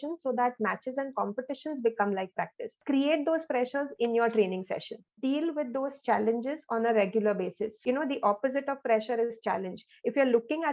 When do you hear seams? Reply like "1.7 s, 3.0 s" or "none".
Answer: 2.8 s, 5.0 s, 7.8 s